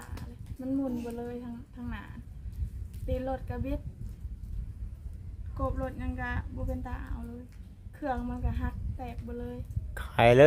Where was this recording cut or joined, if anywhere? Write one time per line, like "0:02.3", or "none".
none